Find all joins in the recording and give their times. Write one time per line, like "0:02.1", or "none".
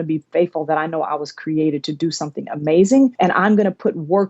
0:03.1

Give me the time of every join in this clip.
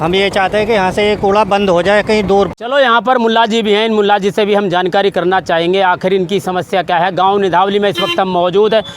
0:02.5

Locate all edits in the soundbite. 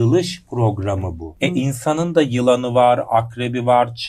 0:01.3

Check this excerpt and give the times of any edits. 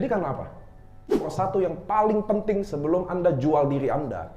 0:01.3

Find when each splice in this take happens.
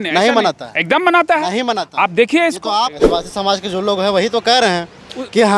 0:03.0

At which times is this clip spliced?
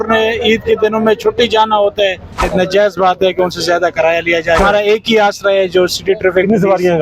0:02.5
0:04.6

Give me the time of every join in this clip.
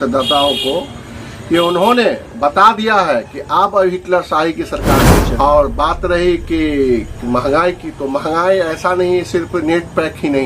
0:05.3

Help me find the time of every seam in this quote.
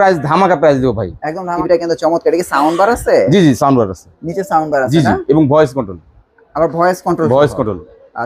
0:01.5

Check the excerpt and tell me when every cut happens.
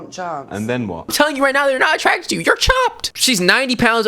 0:01.1
0:03.1

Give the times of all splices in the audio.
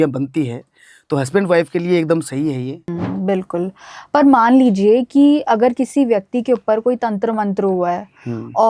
0:02.9

